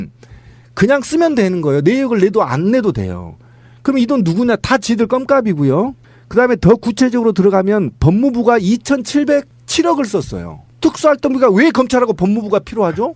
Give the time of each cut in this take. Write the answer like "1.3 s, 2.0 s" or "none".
9.0 s